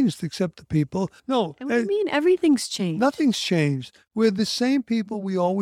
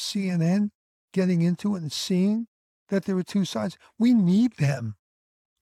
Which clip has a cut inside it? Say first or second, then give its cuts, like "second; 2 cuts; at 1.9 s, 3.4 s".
first; 1 cut; at 1.2 s